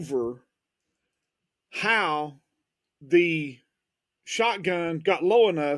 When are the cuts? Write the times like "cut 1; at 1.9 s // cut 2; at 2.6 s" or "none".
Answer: none